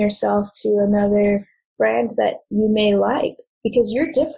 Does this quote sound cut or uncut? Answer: cut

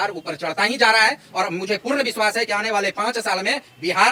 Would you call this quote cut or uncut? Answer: uncut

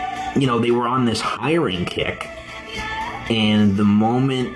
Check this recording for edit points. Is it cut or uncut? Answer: cut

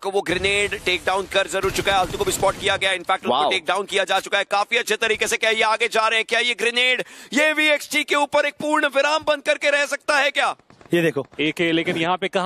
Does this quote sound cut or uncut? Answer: cut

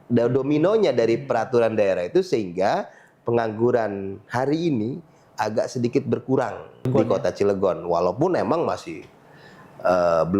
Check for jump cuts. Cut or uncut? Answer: cut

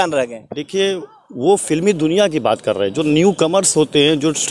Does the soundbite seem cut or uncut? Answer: uncut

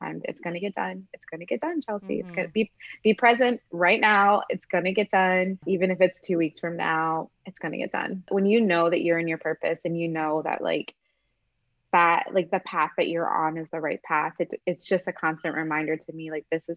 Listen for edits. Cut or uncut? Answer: cut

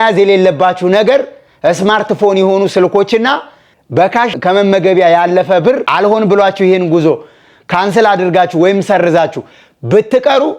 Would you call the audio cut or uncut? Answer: cut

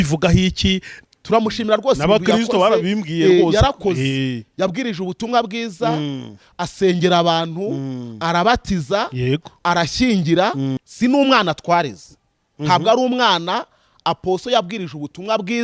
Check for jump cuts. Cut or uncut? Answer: cut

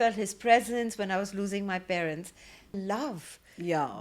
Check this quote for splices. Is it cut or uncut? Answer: cut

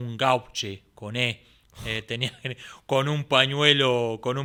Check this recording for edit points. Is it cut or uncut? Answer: uncut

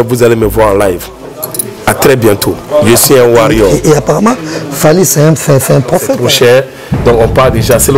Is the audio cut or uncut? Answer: cut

